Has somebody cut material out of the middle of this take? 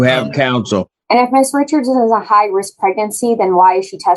yes; 1 cut; at 0.9 s

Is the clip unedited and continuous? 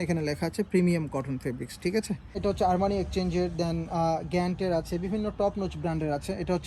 no; 1 cut; at 2.4 s

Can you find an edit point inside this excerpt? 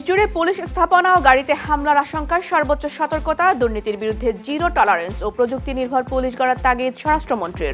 no; 0 cuts

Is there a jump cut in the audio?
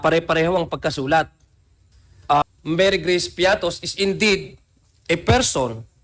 yes; 1 cut; at 2.4 s

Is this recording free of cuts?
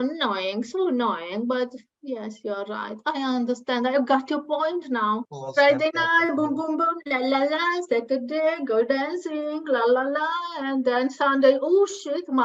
no; 1 cut; at 5.3 s

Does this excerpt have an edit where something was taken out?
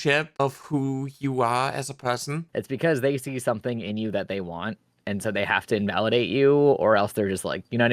yes; 1 cut; at 2.3 s

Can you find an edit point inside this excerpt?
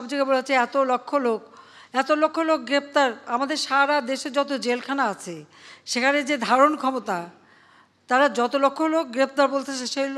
no; 0 cuts

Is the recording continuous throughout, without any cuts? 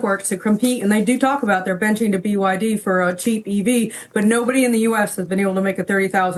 yes; 0 cuts

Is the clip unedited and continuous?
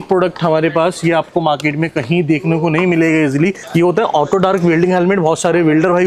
no; 1 cut; at 3.6 s

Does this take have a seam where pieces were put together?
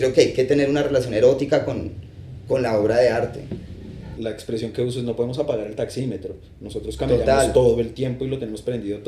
yes; 1 cut; at 4.2 s

